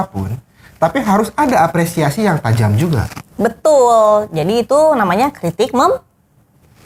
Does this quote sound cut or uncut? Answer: uncut